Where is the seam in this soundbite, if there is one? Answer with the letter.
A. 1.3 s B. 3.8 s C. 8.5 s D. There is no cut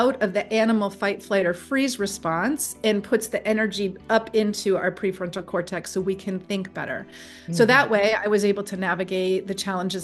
D